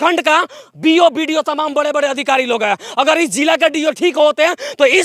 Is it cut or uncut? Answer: uncut